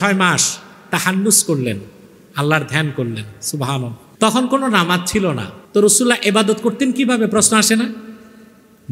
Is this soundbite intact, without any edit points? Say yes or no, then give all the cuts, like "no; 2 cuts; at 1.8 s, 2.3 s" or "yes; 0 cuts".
no; 2 cuts; at 4.0 s, 5.5 s